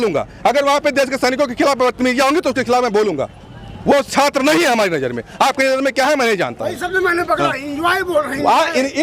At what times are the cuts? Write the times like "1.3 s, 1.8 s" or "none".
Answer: none